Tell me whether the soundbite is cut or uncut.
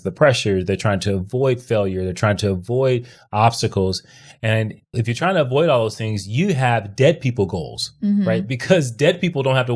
cut